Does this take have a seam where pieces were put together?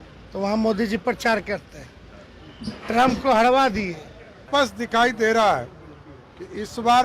yes; 1 cut; at 4.4 s

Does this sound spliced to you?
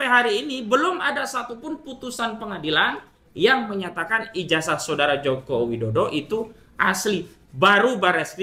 no; 0 cuts

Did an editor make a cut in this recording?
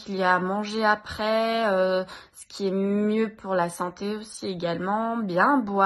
no; 0 cuts

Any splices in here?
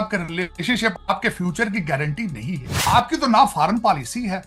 yes; 2 cuts; at 0.9 s, 2.7 s

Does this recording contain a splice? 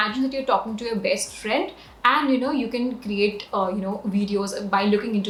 no; 0 cuts

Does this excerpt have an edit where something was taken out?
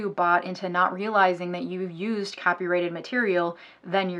no; 0 cuts

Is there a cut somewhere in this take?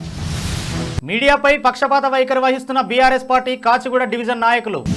no; 0 cuts

